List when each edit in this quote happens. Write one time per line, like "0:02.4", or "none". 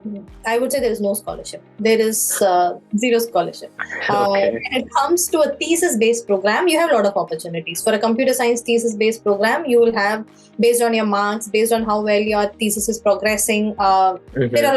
none